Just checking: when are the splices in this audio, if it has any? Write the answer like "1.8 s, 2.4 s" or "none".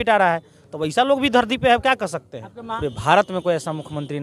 2.7 s